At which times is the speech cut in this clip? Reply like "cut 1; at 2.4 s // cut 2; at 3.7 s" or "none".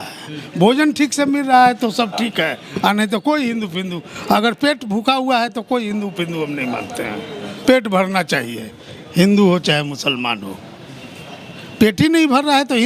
none